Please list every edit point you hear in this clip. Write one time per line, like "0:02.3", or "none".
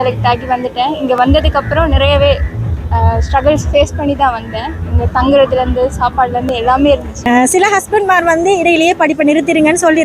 0:07.1